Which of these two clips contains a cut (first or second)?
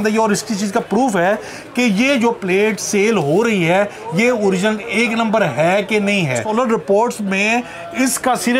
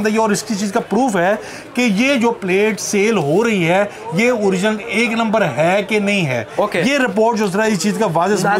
first